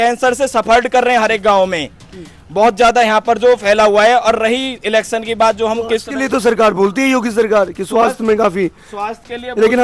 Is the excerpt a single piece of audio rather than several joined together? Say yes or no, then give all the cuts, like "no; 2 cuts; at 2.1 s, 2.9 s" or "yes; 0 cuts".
yes; 0 cuts